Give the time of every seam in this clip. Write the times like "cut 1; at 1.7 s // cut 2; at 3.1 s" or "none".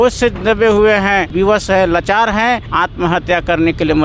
cut 1; at 1.3 s // cut 2; at 2.7 s

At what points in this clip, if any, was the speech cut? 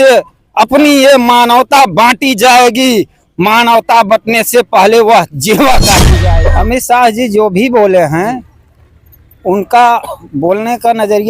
cut 1; at 6.1 s

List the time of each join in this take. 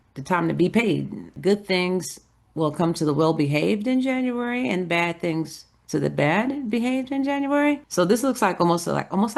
cut 1; at 1.3 s // cut 2; at 7.9 s

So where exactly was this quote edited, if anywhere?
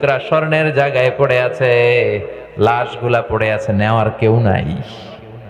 none

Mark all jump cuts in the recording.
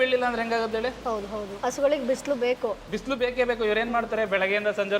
cut 1; at 1.5 s

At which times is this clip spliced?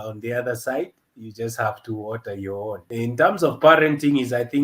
cut 1; at 2.8 s

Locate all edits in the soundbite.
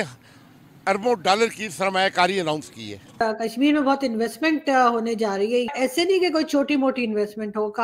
cut 1; at 3.0 s // cut 2; at 5.7 s

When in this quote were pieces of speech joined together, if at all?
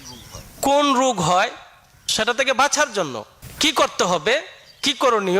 cut 1; at 2.1 s // cut 2; at 3.1 s

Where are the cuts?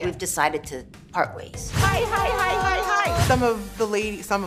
cut 1; at 1.6 s // cut 2; at 3.3 s

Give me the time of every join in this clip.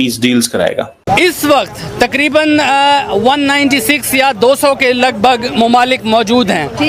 cut 1; at 1.1 s

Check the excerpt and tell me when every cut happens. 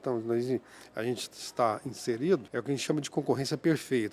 cut 1; at 2.5 s

